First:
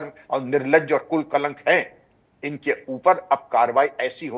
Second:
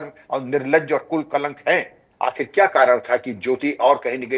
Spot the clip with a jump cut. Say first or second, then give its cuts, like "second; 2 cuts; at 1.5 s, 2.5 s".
second; 1 cut; at 2.0 s